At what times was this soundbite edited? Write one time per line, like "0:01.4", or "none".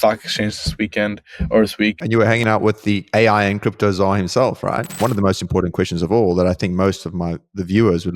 0:02.0
0:05.0